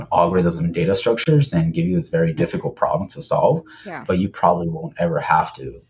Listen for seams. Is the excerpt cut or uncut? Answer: uncut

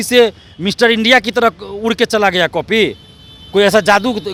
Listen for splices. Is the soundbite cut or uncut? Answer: uncut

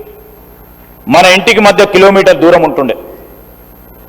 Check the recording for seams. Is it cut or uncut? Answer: uncut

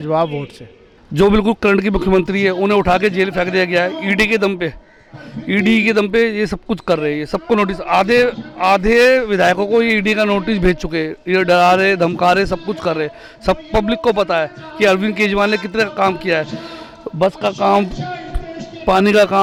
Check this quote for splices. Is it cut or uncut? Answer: uncut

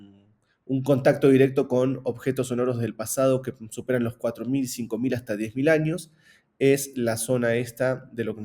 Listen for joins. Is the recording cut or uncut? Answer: uncut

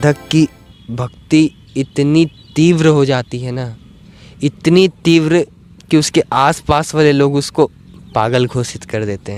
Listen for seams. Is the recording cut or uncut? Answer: uncut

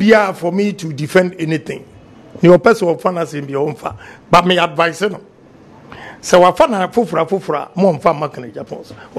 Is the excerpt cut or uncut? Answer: uncut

